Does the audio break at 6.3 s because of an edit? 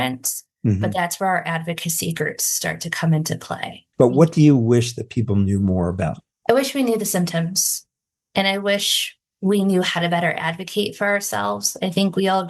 no; 1 cut; at 3.8 s

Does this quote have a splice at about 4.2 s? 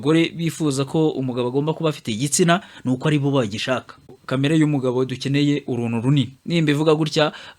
yes; 1 cut; at 4.2 s

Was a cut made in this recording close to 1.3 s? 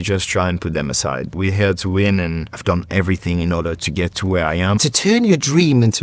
yes; 3 cuts; at 1.3 s, 2.6 s, 4.8 s

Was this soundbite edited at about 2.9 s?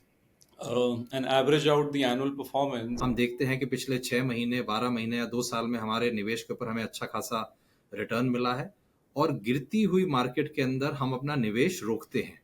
yes; 1 cut; at 2.9 s

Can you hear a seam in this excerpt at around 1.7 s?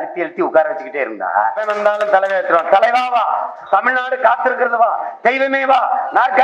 yes; 1 cut; at 1.7 s

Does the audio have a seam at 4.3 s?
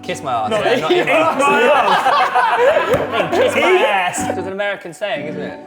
yes; 1 cut; at 4.3 s

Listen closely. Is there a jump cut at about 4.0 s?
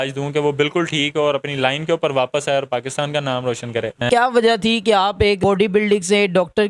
yes; 2 cuts; at 4.0 s, 5.4 s

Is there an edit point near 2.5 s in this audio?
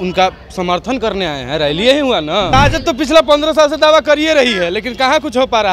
yes; 1 cut; at 2.5 s

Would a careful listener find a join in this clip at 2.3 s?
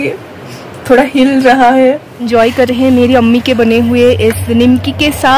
yes; 1 cut; at 2.3 s

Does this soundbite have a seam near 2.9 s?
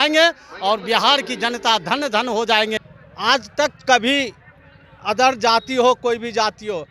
yes; 1 cut; at 2.9 s

